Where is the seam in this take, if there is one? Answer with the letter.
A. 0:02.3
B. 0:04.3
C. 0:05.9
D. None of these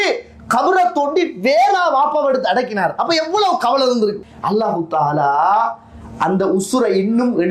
B